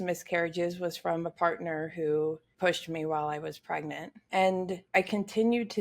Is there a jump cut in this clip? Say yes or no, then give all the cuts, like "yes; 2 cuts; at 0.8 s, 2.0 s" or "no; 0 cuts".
yes; 3 cuts; at 2.5 s, 4.1 s, 4.8 s